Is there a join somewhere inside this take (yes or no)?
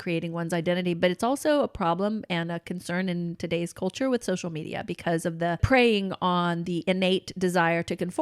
yes